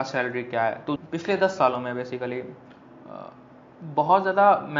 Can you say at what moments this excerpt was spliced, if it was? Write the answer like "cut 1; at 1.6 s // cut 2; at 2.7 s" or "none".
cut 1; at 1.0 s